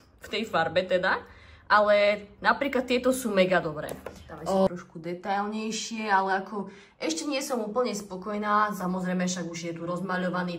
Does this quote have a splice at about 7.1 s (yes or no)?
no